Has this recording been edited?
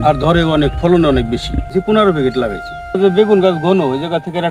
yes; 2 cuts; at 1.7 s, 3.0 s

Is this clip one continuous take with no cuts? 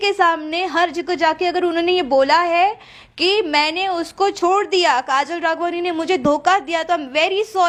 yes; 0 cuts

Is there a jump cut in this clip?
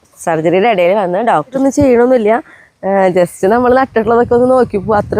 yes; 1 cut; at 1.6 s

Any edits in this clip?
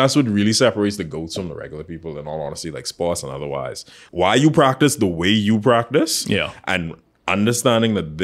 yes; 1 cut; at 4.0 s

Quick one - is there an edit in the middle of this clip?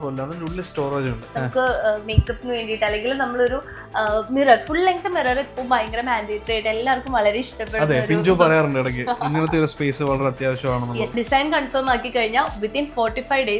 yes; 2 cuts; at 1.2 s, 11.1 s

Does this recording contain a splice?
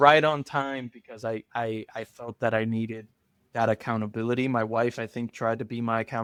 no; 0 cuts

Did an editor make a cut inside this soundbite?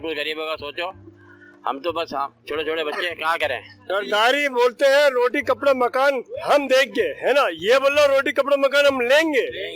yes; 1 cut; at 3.8 s

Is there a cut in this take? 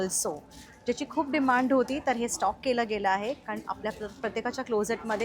no; 0 cuts

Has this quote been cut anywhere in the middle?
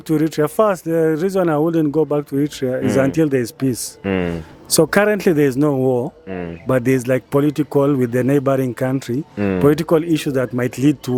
no; 0 cuts

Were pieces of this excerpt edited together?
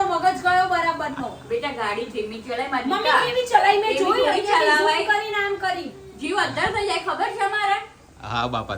no; 0 cuts

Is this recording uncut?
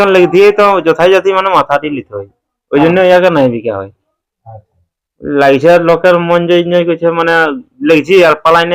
yes; 0 cuts

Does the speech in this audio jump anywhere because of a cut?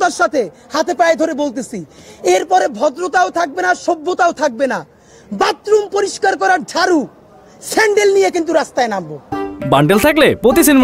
no; 0 cuts

